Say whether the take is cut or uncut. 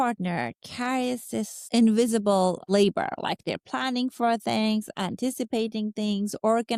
uncut